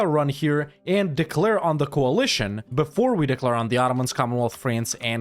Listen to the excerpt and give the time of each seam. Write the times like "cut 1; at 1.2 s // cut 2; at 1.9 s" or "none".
none